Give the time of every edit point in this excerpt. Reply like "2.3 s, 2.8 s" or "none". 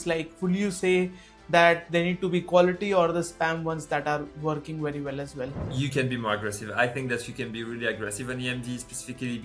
none